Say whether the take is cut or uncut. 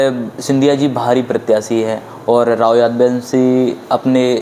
uncut